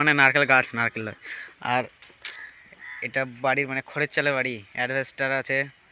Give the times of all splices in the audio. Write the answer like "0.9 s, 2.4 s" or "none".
none